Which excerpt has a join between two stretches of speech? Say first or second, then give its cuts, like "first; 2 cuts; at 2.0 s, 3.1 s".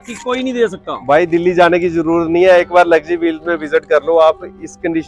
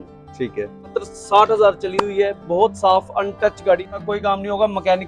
second; 2 cuts; at 0.9 s, 3.9 s